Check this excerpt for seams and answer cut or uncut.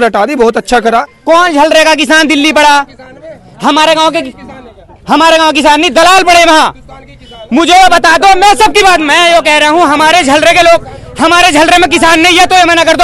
cut